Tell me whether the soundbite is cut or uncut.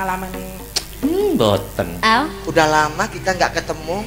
cut